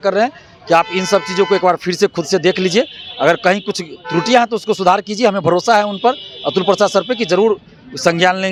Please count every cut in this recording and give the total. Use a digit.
0